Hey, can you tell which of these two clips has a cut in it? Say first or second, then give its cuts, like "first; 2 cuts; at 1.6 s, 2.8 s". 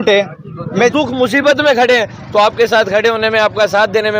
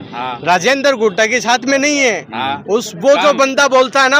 first; 1 cut; at 0.9 s